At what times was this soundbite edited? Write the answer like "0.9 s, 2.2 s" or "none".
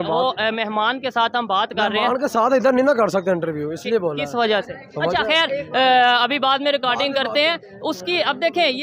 none

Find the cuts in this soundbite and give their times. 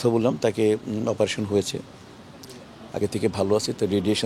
none

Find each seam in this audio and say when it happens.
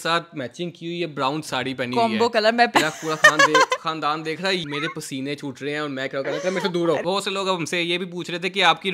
2.7 s, 4.6 s, 7.0 s

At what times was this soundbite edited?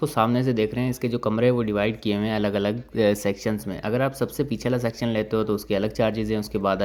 none

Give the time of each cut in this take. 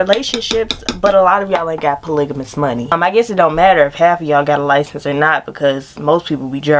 2.9 s

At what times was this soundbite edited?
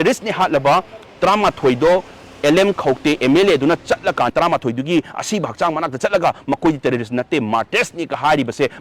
4.3 s

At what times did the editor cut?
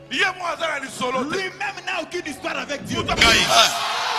3.2 s

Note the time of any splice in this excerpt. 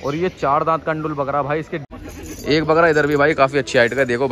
1.9 s

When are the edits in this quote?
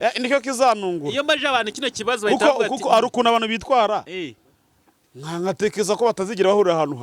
none

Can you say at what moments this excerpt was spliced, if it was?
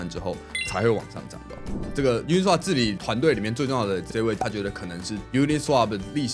1.8 s, 3.0 s, 4.4 s

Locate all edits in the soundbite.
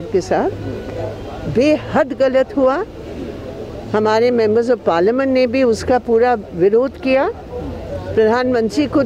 none

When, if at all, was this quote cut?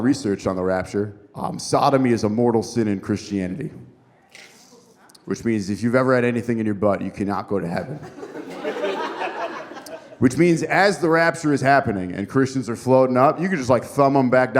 1.2 s

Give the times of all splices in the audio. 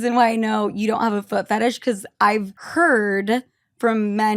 2.6 s

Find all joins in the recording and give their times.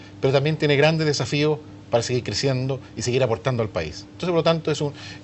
1.5 s

